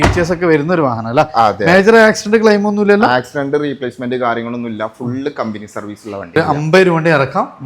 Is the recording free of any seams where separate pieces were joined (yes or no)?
no